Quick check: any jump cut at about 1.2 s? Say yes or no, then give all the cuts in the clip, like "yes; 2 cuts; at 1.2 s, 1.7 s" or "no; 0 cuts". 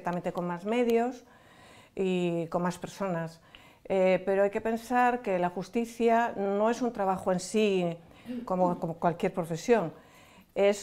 no; 0 cuts